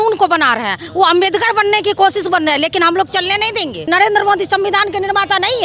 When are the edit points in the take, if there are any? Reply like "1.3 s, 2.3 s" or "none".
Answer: 3.9 s